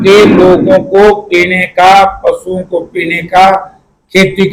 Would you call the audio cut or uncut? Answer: uncut